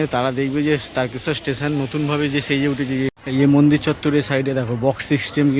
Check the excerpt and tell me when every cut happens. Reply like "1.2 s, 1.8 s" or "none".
3.2 s

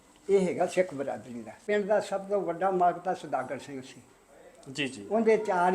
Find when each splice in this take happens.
1.6 s

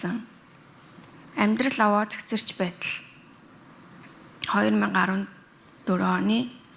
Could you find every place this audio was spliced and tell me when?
none

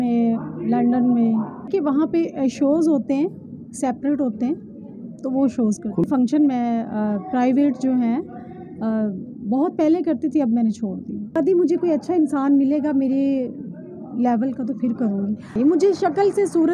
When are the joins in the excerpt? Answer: 1.7 s, 6.0 s, 11.4 s, 15.5 s

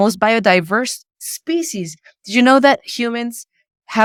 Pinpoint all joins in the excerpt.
none

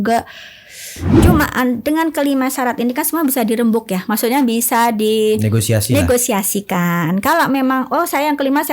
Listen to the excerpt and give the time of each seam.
1.1 s

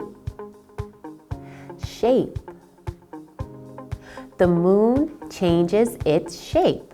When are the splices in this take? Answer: 2.8 s, 4.3 s

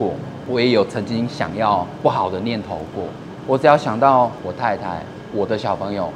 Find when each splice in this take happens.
1.9 s, 3.3 s, 4.4 s

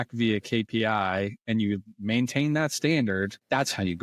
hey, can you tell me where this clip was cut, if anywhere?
none

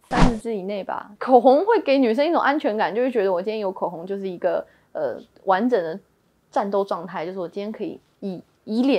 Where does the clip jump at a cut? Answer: 1.1 s

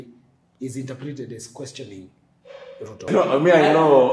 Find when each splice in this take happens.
3.1 s

